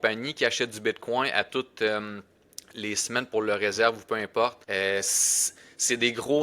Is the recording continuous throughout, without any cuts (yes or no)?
no